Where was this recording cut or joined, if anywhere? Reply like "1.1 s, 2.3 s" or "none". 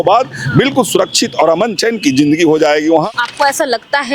1.8 s, 3.1 s